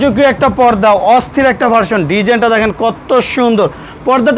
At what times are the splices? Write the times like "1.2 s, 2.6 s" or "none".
none